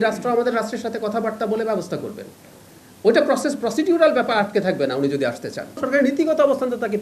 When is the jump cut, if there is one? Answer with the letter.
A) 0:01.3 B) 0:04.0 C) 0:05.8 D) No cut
C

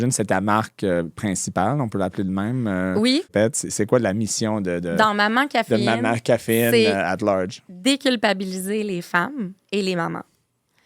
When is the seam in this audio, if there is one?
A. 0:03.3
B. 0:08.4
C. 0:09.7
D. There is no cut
A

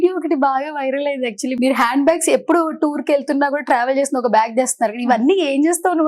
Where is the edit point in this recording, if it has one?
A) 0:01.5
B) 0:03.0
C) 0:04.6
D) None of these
A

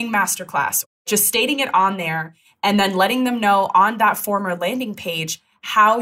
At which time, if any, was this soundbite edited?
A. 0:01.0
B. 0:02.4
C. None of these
A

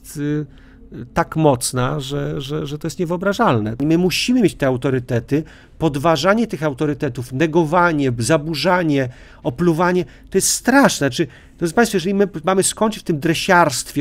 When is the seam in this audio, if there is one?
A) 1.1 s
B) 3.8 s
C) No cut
B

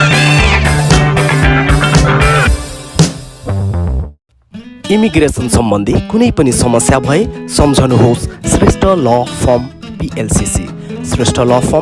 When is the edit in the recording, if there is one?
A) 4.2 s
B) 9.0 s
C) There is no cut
A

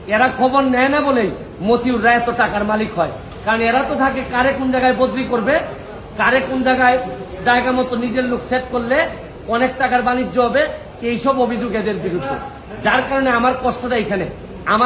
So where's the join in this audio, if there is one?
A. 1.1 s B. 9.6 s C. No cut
C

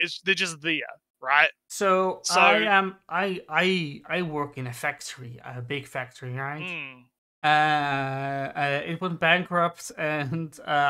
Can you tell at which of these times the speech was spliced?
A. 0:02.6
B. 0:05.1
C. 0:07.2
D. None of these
D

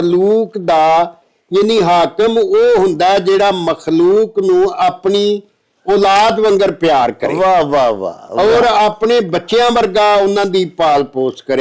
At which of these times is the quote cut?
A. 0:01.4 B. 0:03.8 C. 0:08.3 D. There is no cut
D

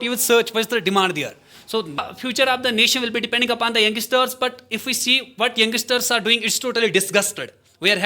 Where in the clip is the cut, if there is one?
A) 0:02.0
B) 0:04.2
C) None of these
A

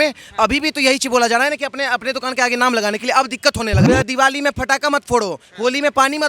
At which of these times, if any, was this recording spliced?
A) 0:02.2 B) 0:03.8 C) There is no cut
B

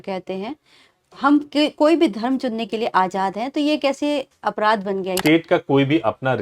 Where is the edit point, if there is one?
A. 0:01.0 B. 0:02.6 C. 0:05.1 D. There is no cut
C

